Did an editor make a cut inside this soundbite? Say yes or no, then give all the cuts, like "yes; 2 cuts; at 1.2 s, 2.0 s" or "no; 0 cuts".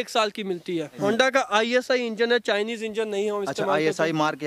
yes; 1 cut; at 1.0 s